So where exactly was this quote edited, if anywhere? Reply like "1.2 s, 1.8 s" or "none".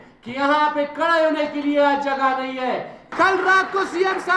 3.0 s